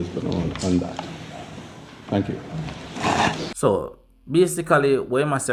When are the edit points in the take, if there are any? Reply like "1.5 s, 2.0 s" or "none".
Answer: none